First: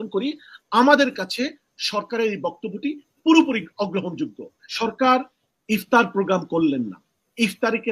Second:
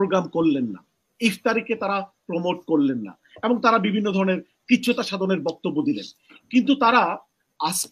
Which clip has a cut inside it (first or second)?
first